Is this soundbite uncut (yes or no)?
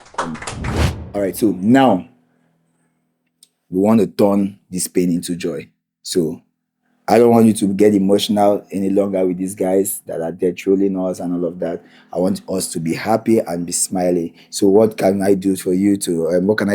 no